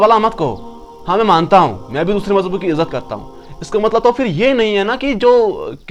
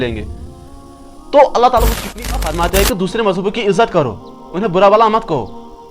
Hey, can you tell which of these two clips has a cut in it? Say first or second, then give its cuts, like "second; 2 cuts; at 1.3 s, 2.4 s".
second; 1 cut; at 2.3 s